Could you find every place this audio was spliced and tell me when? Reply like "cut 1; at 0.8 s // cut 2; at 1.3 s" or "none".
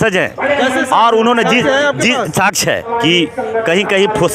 cut 1; at 2.9 s

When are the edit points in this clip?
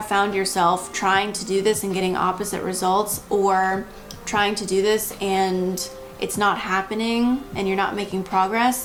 none

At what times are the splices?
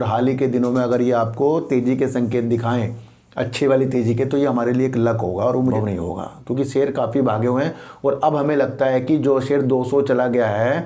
cut 1; at 5.7 s

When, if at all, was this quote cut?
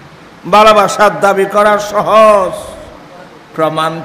none

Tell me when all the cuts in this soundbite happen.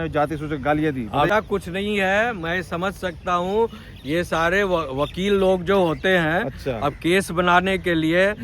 cut 1; at 1.3 s

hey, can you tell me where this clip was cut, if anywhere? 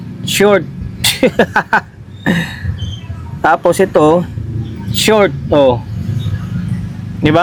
none

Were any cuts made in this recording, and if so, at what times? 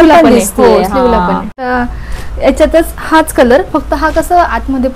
cut 1; at 1.7 s

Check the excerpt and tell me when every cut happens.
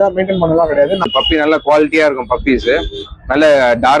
cut 1; at 1.0 s

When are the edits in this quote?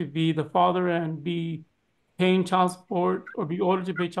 none

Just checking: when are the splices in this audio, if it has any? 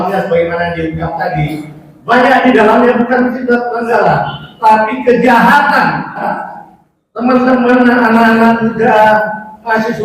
cut 1; at 6.3 s

